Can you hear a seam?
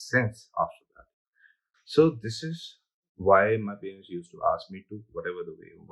no; 0 cuts

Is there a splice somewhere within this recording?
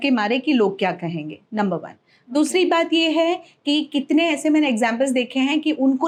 no; 0 cuts

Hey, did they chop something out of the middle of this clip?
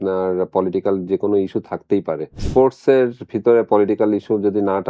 yes; 1 cut; at 2.4 s

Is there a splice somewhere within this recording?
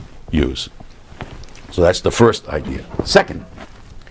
yes; 1 cut; at 2.6 s

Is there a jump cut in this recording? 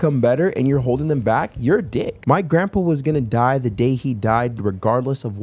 yes; 1 cut; at 2.1 s

